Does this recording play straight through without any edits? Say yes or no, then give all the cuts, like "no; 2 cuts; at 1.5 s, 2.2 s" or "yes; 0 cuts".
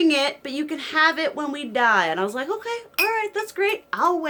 yes; 0 cuts